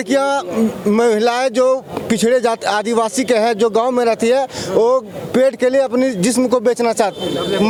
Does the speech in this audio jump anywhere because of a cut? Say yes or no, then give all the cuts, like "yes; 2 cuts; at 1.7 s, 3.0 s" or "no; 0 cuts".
no; 0 cuts